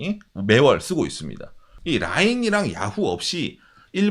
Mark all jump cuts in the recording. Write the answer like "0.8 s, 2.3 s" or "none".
1.7 s